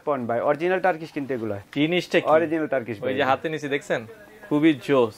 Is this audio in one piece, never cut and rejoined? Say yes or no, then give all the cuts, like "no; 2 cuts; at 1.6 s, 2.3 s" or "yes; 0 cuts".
no; 1 cut; at 1.6 s